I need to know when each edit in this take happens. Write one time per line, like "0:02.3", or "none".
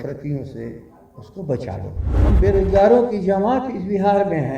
0:02.1

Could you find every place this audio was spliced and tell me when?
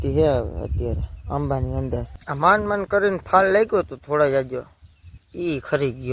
0:02.2

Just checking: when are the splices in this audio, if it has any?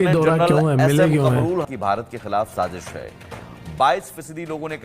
0:01.6

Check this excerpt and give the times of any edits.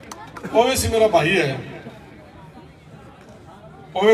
none

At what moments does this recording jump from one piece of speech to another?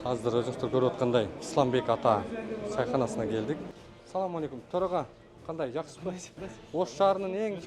0:01.4
0:03.7
0:06.3

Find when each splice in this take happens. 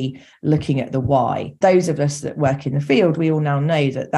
0:01.5

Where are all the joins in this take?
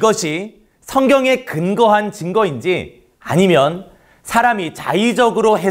0:03.7

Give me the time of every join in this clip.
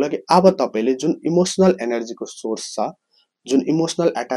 none

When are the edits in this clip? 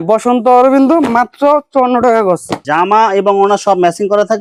none

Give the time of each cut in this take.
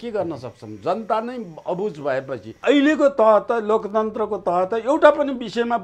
0:02.6

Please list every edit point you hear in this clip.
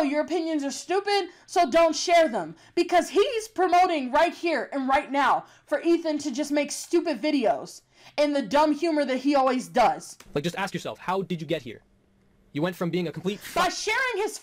none

